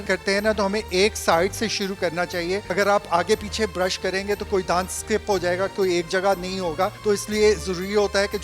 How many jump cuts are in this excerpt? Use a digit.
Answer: 2